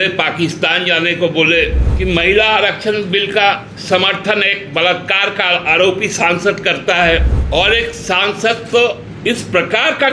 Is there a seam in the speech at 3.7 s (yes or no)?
yes